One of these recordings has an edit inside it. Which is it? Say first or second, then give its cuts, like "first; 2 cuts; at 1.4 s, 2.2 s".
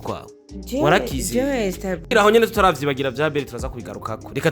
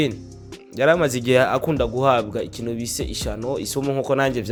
first; 1 cut; at 1.9 s